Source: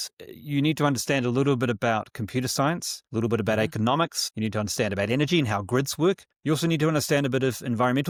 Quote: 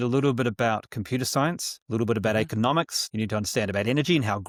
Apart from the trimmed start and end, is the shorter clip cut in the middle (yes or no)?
no